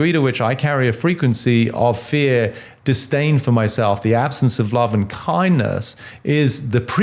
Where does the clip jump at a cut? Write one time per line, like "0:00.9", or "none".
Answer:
none